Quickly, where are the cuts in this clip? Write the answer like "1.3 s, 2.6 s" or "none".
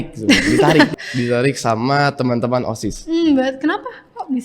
1.0 s